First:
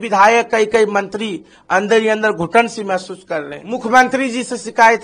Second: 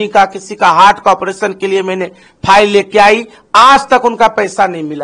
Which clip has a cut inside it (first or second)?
first